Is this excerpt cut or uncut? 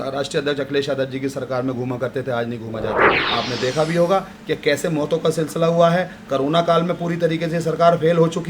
cut